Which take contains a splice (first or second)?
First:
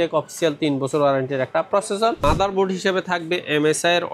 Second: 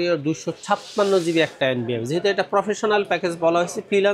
first